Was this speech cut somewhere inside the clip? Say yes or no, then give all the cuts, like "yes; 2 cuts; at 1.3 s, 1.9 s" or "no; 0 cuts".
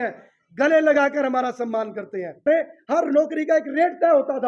yes; 1 cut; at 2.4 s